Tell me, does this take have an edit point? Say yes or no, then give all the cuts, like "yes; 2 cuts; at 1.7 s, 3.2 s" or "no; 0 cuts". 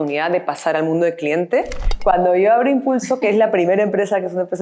yes; 1 cut; at 1.8 s